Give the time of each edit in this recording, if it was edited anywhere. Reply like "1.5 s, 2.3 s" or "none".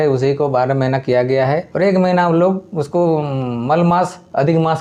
none